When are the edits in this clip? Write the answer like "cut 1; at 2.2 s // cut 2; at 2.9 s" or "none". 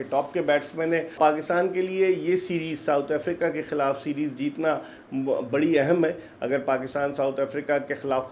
cut 1; at 1.1 s